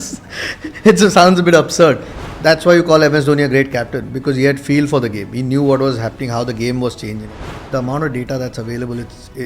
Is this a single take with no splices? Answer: no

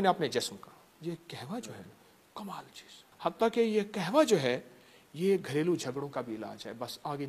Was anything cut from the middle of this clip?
yes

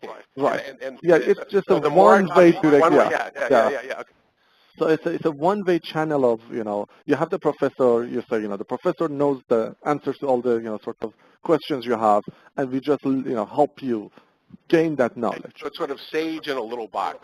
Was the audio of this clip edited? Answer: yes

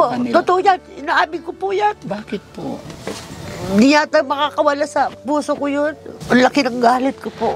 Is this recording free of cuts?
no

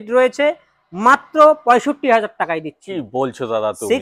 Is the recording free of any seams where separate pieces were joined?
yes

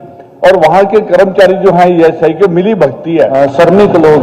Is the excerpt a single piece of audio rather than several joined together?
no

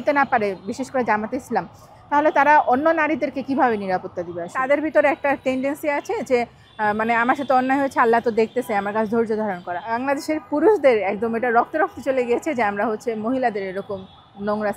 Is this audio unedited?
no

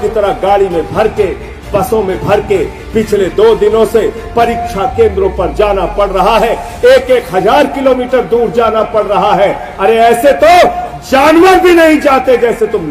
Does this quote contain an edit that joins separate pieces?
no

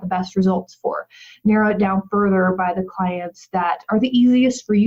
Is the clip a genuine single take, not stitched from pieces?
yes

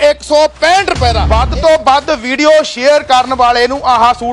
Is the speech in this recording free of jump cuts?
no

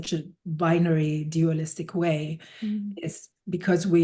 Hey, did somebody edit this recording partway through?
no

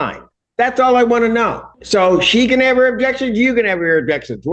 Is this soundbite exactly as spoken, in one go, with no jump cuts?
no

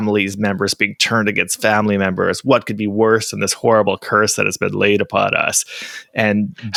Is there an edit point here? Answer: no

